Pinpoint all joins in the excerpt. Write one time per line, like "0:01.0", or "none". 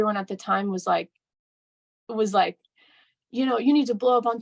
none